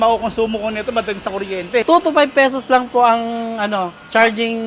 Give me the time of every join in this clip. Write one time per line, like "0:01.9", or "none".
0:01.8